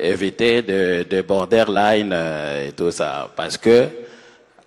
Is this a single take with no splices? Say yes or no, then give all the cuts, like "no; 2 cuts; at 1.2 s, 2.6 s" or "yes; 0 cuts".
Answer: yes; 0 cuts